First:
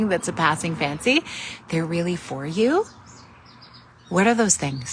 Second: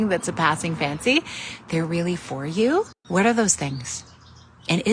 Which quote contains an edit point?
second; 1 cut; at 3.0 s

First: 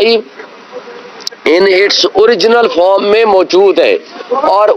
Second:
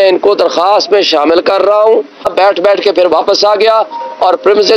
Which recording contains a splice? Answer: second; 1 cut; at 2.3 s

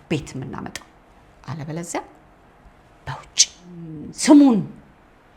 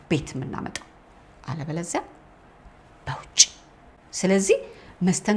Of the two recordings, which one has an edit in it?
first; 1 cut; at 4.0 s

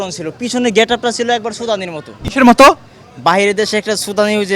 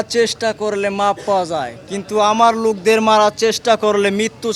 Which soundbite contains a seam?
first; 1 cut; at 2.2 s

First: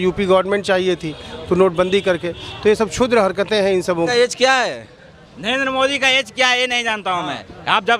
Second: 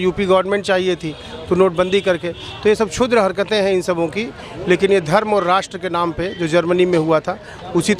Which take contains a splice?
first; 1 cut; at 4.1 s

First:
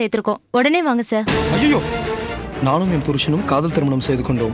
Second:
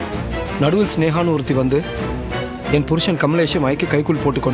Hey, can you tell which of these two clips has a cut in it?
first; 1 cut; at 2.3 s

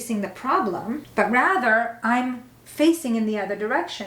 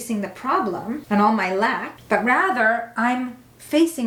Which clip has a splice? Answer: first; 1 cut; at 1.0 s

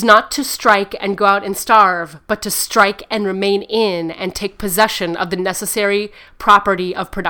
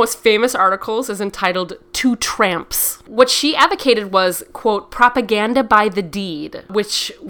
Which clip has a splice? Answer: second; 1 cut; at 3.0 s

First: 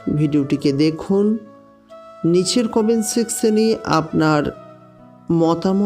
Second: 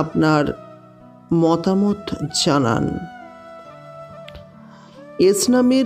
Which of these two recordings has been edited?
second; 2 cuts; at 3.5 s, 5.2 s

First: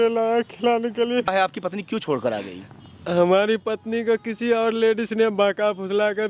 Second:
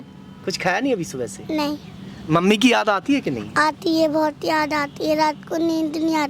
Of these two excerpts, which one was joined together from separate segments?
first; 1 cut; at 1.3 s

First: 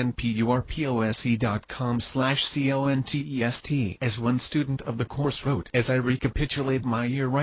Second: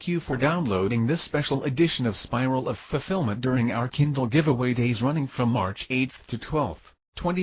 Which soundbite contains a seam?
first; 1 cut; at 1.6 s

